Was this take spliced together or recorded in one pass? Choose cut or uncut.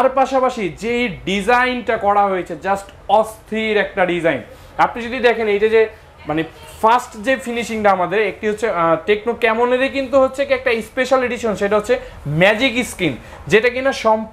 uncut